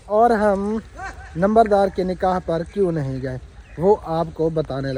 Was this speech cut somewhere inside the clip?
no; 0 cuts

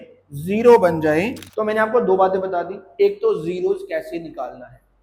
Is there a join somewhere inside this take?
yes; 1 cut; at 1.4 s

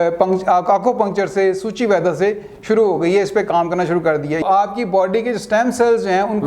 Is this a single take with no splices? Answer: no; 1 cut; at 4.4 s

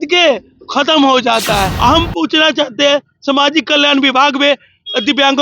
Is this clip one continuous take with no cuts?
no; 1 cut; at 1.7 s

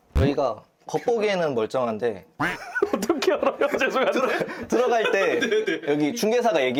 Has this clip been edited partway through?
no; 0 cuts

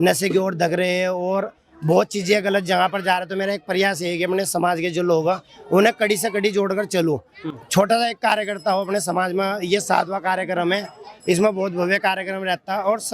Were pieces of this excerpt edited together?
no; 0 cuts

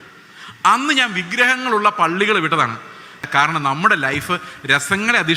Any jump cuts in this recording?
yes; 1 cut; at 3.3 s

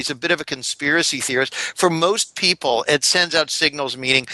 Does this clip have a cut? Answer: no; 0 cuts

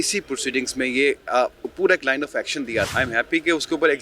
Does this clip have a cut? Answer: yes; 1 cut; at 2.9 s

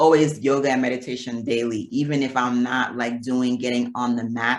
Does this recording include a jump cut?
no; 0 cuts

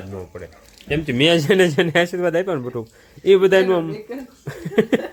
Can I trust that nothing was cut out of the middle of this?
yes; 0 cuts

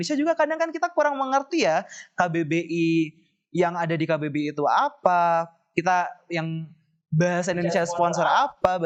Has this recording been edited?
no; 0 cuts

